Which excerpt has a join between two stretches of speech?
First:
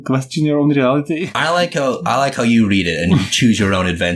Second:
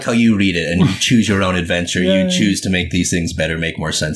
first; 1 cut; at 1.3 s

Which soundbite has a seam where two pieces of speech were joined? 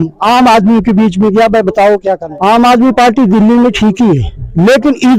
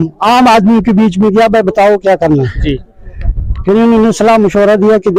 first; 1 cut; at 2.2 s

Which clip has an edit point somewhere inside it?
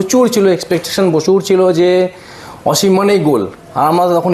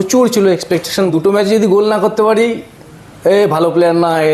second; 1 cut; at 1.1 s

